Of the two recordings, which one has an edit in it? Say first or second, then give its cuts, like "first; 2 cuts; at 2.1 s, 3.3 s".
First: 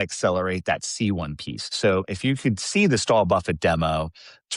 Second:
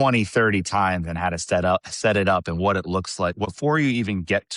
second; 1 cut; at 3.4 s